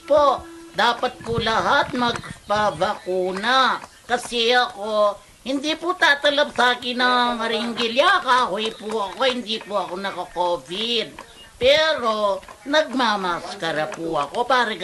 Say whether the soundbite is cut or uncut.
uncut